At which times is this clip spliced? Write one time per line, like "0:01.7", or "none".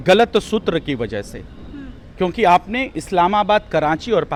none